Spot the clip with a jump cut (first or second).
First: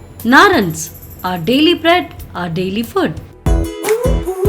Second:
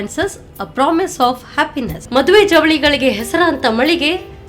first